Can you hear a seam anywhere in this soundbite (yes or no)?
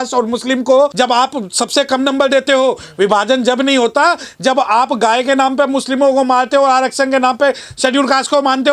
yes